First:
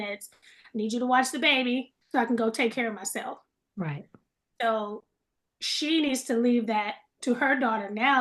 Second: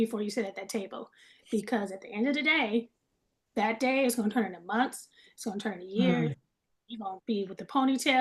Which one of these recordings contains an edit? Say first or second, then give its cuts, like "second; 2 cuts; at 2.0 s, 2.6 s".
first; 1 cut; at 2.0 s